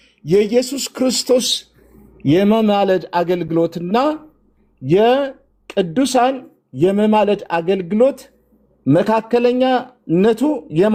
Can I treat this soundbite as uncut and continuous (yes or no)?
yes